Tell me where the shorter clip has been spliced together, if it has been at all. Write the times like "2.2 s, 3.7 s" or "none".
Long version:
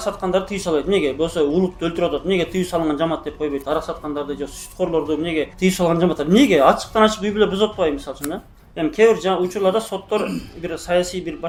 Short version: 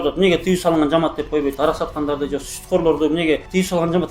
none

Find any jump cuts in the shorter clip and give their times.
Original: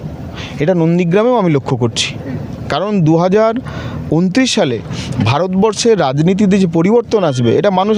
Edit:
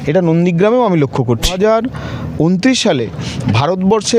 1.6 s

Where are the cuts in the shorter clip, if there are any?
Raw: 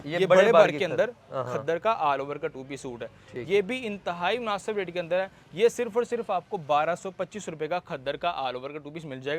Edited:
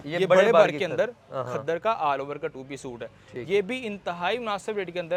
none

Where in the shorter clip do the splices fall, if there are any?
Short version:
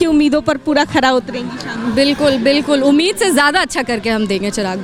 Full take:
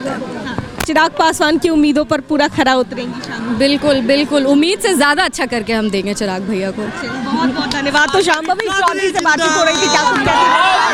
none

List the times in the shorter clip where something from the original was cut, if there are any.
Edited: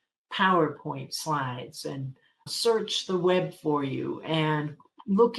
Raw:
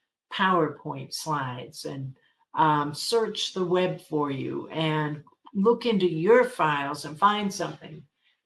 2.5 s

